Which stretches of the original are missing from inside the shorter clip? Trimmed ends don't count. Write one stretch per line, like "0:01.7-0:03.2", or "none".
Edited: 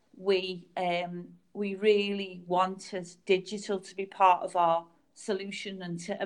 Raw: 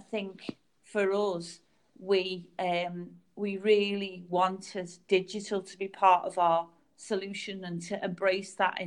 none